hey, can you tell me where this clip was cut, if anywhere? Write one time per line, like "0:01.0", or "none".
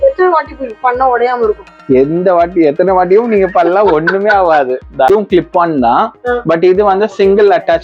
0:05.1